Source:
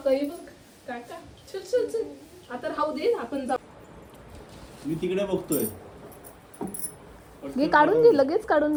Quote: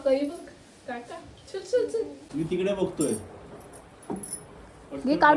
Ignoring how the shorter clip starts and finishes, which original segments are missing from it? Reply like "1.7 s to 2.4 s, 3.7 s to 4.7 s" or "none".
2.2 s to 4.7 s